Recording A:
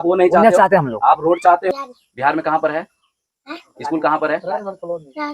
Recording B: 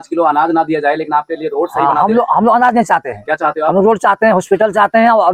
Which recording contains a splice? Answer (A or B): A